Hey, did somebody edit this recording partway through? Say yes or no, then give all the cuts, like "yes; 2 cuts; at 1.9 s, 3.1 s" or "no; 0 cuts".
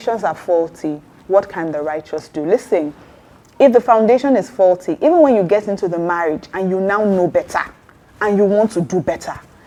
no; 0 cuts